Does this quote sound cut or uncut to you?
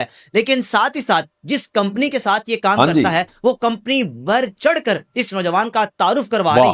uncut